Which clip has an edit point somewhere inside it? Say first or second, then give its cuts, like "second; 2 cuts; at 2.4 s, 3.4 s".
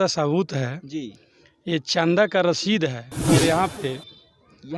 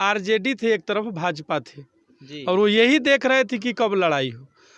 first; 1 cut; at 3.1 s